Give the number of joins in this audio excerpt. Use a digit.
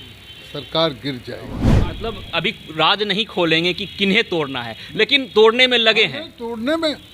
1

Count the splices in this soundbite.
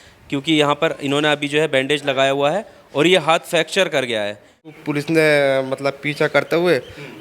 1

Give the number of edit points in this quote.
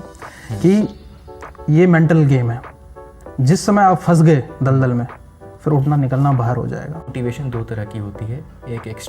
1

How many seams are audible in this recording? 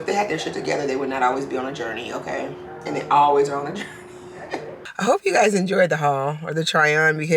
1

